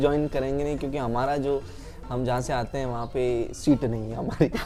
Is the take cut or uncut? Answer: uncut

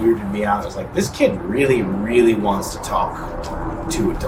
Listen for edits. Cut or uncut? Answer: uncut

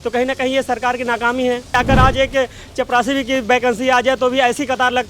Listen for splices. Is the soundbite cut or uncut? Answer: cut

